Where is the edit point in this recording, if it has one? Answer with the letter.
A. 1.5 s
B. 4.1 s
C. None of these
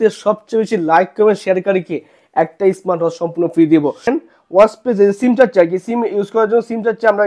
B